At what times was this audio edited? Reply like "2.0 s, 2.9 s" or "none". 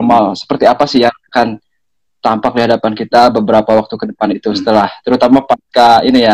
3.2 s